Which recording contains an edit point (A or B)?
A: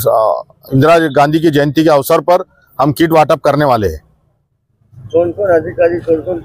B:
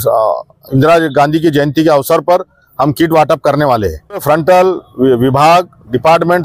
B